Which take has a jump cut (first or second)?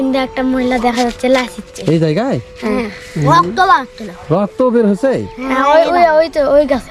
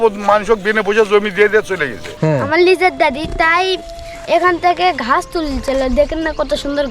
second